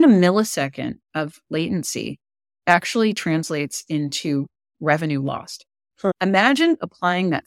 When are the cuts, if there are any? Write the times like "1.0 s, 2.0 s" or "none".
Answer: 6.2 s